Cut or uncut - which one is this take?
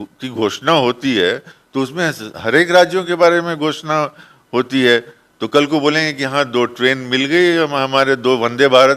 uncut